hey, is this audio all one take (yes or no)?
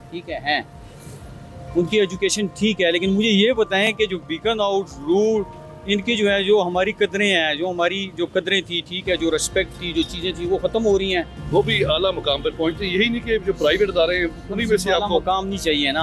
no